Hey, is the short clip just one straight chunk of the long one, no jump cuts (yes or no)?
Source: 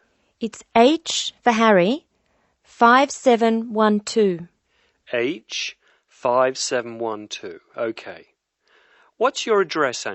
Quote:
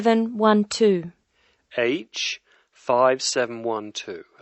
yes